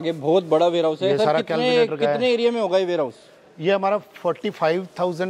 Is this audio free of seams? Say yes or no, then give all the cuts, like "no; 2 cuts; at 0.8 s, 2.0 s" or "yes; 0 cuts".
yes; 0 cuts